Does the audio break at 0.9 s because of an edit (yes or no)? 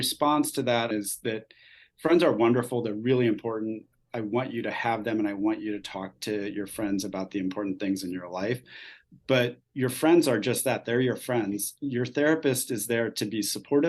yes